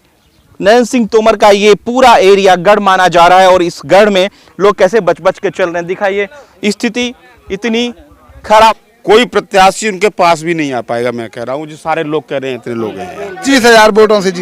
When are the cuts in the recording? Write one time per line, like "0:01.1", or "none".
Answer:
0:08.7
0:13.4